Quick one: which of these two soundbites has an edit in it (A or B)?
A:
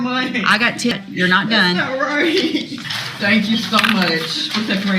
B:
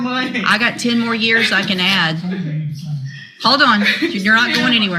A